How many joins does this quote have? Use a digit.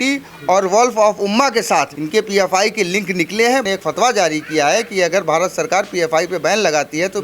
2